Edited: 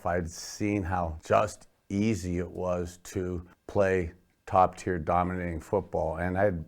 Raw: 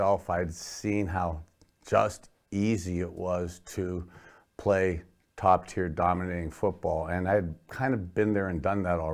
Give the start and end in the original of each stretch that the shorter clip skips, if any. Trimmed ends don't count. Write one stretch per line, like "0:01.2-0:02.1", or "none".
0:01.4-0:01.8
0:04.1-0:04.4